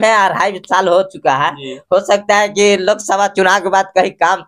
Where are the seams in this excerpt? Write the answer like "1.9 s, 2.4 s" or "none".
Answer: none